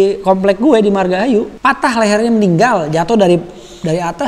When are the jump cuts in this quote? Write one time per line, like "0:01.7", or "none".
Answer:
0:01.5